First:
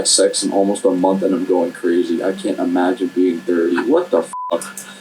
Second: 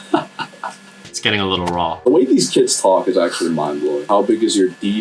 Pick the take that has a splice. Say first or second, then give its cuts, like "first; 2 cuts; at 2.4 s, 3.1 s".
second; 2 cuts; at 1.0 s, 4.0 s